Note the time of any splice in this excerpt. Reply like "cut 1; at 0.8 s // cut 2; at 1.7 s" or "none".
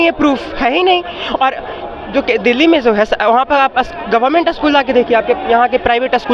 none